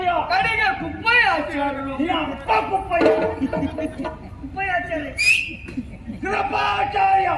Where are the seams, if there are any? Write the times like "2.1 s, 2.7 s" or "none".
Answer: none